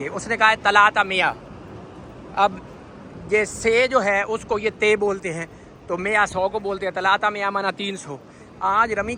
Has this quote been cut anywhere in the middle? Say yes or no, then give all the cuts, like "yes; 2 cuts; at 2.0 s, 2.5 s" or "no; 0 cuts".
no; 0 cuts